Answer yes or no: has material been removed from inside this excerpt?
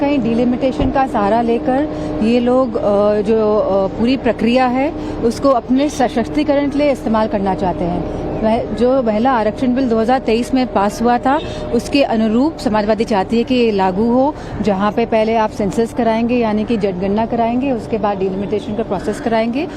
yes